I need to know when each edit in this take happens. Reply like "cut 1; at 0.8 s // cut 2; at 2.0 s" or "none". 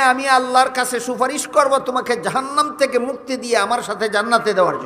none